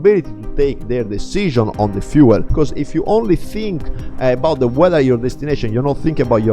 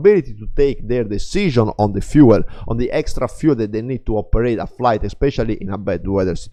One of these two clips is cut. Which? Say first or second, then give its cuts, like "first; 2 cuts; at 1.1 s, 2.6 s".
first; 1 cut; at 2.5 s